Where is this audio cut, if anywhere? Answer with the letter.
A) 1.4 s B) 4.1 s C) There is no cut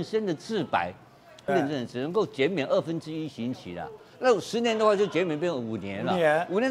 A